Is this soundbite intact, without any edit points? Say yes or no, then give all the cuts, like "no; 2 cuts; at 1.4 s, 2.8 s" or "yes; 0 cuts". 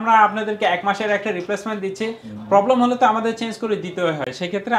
yes; 0 cuts